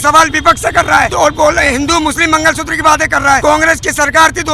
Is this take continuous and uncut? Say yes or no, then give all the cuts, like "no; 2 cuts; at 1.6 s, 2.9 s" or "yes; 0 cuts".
no; 2 cuts; at 1.1 s, 3.4 s